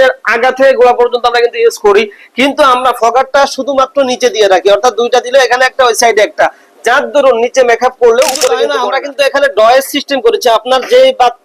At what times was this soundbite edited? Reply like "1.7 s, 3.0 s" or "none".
8.8 s